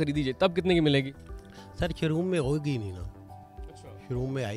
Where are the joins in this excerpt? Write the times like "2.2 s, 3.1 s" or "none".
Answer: none